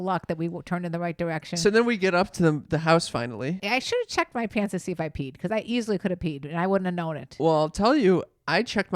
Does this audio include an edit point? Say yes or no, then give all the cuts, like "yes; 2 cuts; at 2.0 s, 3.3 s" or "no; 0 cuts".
yes; 1 cut; at 3.6 s